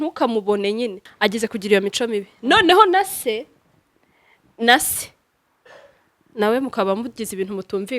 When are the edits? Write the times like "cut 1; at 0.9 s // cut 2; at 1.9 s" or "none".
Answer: cut 1; at 1.0 s